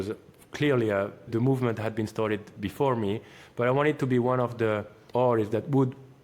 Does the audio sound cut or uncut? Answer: cut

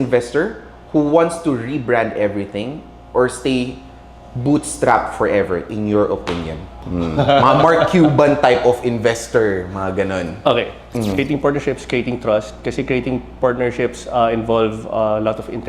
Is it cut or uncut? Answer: cut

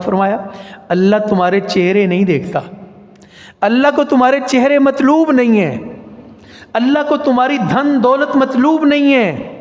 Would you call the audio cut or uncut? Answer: uncut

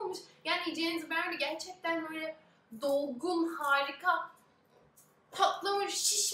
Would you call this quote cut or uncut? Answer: uncut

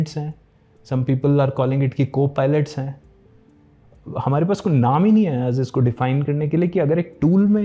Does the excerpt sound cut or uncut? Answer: uncut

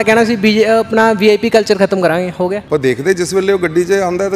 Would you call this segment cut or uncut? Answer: cut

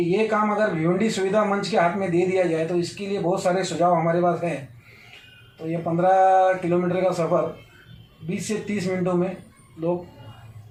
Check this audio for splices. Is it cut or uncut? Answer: uncut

